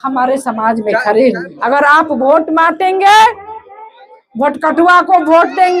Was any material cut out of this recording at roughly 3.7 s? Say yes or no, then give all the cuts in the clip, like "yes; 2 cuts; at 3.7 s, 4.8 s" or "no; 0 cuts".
no; 1 cut; at 1.5 s